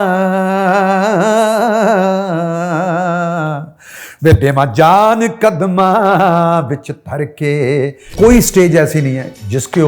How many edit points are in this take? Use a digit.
1